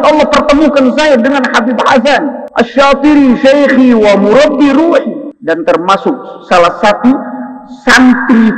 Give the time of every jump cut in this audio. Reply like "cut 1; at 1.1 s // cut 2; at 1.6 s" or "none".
cut 1; at 2.4 s // cut 2; at 5.3 s